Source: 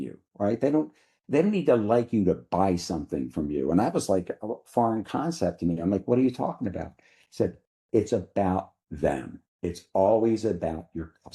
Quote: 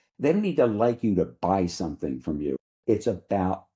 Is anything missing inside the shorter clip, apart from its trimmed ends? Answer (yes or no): yes